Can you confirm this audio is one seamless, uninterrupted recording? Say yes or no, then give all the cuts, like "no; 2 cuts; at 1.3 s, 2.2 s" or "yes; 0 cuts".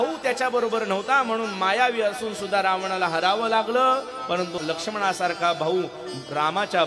no; 1 cut; at 4.6 s